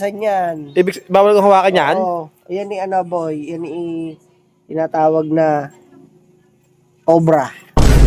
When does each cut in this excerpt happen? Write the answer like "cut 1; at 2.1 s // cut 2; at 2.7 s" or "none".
none

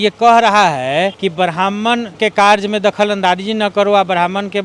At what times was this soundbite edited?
cut 1; at 1.2 s // cut 2; at 2.1 s

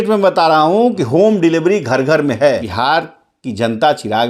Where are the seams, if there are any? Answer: cut 1; at 2.7 s

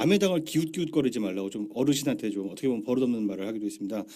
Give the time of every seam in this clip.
cut 1; at 1.7 s

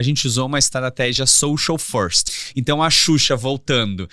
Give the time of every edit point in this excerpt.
cut 1; at 2.3 s

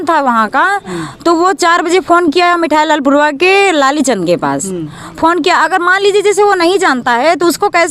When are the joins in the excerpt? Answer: none

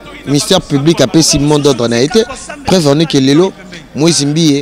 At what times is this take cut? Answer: none

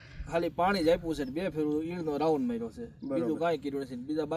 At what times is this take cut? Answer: none

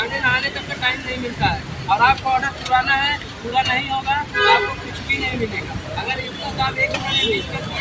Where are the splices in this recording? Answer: none

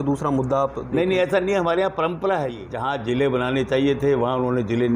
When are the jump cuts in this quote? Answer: cut 1; at 2.7 s

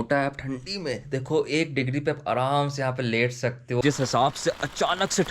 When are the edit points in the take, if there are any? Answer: cut 1; at 3.8 s

